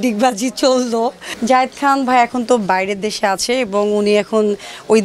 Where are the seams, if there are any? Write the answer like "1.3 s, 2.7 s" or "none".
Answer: 1.3 s